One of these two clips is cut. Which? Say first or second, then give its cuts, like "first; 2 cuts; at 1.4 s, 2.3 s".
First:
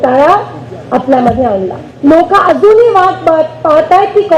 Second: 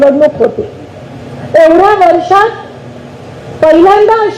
first; 1 cut; at 1.8 s